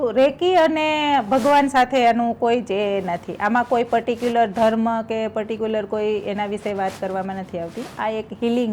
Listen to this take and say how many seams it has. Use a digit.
0